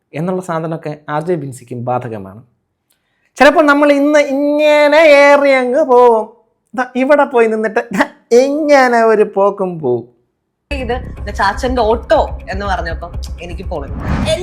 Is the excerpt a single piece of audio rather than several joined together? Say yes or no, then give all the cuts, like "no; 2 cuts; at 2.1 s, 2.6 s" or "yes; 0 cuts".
no; 1 cut; at 10.7 s